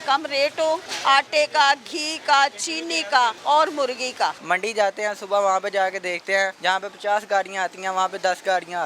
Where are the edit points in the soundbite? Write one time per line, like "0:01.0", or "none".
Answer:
0:00.9
0:03.4
0:04.4
0:06.6